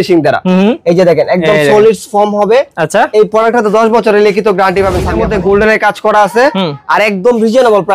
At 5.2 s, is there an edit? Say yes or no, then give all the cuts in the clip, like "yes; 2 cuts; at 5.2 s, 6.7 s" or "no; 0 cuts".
yes; 1 cut; at 5.2 s